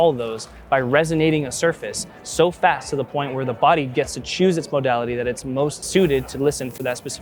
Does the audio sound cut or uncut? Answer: cut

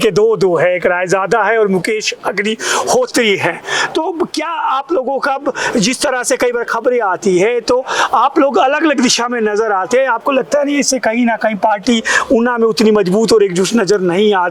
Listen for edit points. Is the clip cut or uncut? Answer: uncut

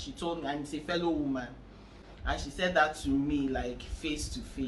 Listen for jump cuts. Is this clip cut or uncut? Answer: uncut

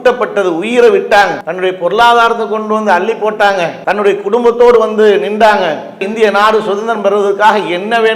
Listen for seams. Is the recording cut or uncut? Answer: cut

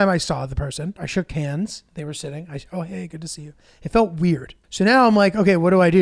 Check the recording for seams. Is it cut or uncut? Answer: cut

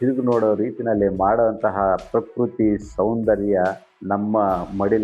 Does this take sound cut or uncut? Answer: cut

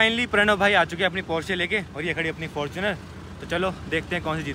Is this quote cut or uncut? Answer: uncut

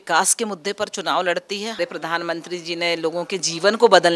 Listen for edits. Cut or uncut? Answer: cut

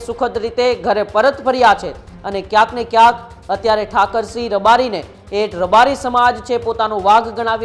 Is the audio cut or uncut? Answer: uncut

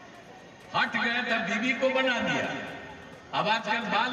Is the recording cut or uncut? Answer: uncut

